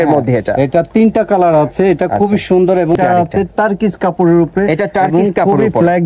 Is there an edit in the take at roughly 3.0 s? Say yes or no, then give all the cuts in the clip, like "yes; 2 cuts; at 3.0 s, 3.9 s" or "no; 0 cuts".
yes; 1 cut; at 3.0 s